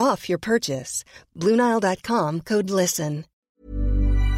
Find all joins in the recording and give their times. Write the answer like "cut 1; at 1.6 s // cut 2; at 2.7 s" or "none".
cut 1; at 3.5 s